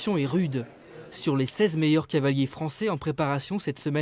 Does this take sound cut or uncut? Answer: cut